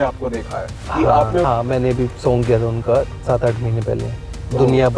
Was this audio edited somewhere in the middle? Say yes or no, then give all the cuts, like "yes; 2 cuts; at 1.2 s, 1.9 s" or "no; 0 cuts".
yes; 1 cut; at 1.4 s